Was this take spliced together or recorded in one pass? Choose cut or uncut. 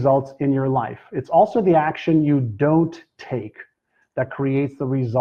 uncut